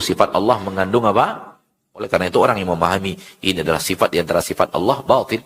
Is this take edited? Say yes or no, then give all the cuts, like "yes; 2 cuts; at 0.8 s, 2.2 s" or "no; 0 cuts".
yes; 1 cut; at 2.1 s